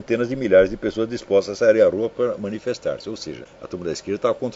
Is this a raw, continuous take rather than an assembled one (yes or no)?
no